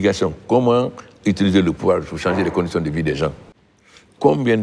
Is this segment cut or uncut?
cut